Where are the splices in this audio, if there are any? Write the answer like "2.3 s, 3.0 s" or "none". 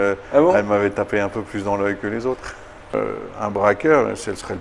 2.9 s